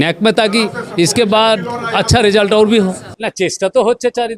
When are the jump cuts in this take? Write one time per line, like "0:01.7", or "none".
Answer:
none